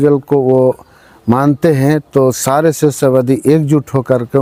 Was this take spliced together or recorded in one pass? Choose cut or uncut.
uncut